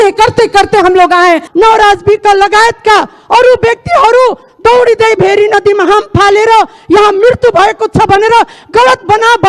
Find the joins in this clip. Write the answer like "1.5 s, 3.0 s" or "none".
1.5 s